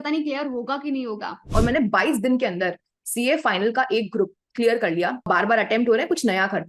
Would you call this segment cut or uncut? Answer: cut